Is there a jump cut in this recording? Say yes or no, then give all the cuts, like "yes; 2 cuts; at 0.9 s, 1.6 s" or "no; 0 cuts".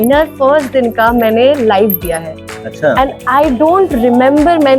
no; 0 cuts